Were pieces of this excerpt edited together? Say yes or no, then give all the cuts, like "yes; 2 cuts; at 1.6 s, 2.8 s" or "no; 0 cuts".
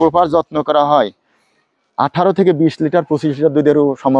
no; 0 cuts